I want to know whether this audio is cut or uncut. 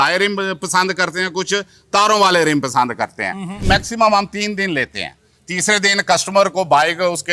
cut